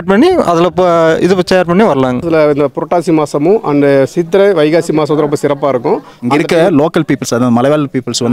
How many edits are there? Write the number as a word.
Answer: two